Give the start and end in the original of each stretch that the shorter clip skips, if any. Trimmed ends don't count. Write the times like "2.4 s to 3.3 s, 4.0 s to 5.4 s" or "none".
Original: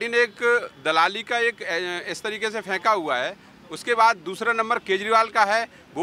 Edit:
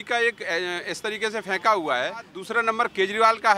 3.6 s to 4.3 s